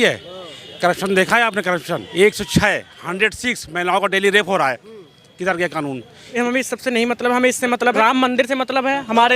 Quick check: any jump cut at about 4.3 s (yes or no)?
no